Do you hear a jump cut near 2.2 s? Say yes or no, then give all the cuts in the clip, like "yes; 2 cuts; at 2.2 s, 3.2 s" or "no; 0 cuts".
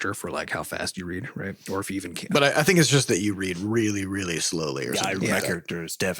yes; 1 cut; at 2.2 s